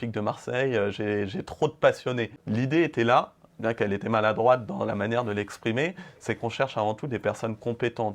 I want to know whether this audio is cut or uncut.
cut